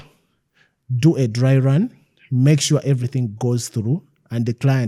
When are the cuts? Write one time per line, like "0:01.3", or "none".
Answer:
none